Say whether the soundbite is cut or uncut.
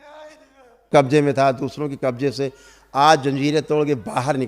cut